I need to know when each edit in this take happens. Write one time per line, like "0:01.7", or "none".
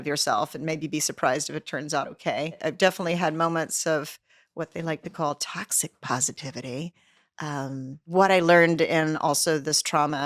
0:02.6
0:08.0